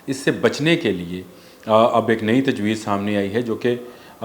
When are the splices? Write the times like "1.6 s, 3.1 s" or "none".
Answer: none